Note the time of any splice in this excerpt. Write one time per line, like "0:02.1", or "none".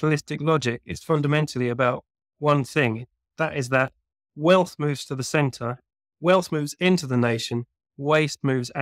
none

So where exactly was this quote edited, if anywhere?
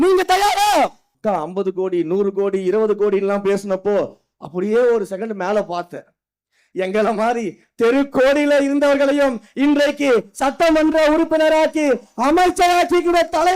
0:01.1

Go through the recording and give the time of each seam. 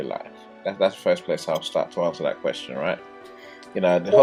none

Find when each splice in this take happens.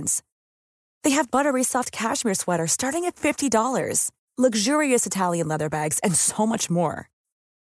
none

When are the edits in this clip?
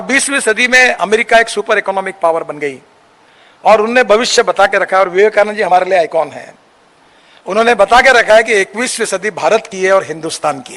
none

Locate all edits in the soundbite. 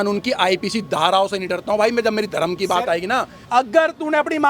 0:03.4

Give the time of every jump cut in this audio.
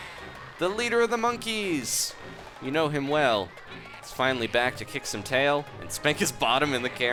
none

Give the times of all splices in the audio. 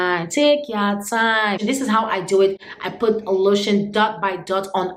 0:01.6

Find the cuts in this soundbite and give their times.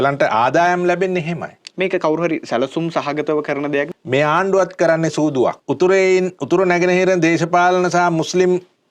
0:03.9
0:05.6

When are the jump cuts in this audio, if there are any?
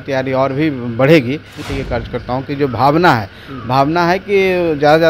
0:01.6

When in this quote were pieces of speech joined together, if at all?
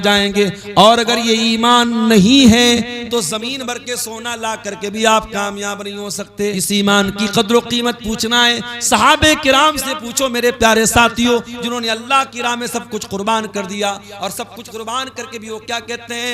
0:06.2

